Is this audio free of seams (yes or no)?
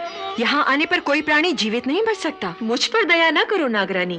no